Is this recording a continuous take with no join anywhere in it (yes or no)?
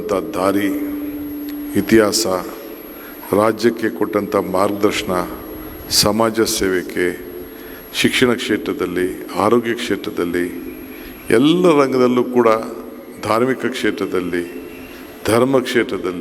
yes